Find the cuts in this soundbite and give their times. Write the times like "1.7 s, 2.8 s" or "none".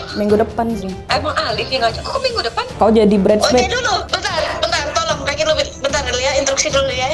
0.9 s, 2.7 s, 4.1 s